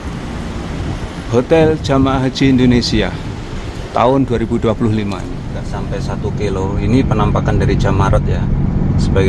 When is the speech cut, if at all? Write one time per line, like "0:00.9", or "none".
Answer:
0:05.7